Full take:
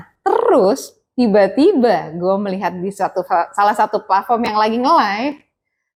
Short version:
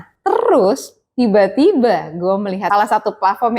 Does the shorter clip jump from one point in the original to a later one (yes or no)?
yes